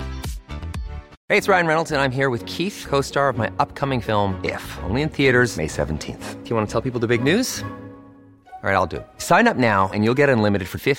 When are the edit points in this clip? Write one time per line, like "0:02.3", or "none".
0:01.1